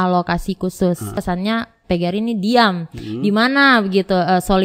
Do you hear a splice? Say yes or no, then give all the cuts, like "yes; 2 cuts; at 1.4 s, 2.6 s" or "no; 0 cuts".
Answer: yes; 1 cut; at 1.2 s